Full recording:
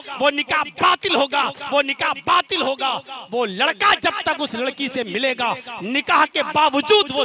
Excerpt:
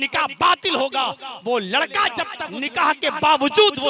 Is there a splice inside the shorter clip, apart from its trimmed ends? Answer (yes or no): yes